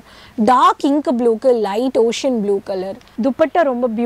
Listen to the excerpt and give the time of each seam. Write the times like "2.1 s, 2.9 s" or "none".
3.0 s